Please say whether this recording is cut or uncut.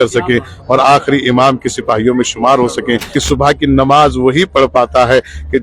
cut